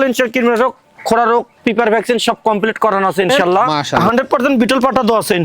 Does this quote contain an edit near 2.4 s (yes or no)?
no